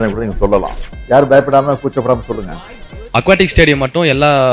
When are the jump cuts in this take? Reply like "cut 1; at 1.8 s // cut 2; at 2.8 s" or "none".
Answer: cut 1; at 3.0 s